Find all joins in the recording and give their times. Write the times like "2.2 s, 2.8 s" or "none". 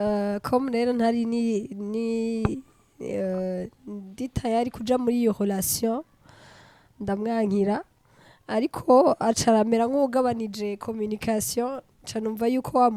none